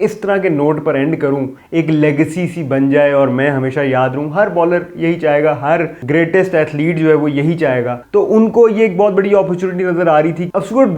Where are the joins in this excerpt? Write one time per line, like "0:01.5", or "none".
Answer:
none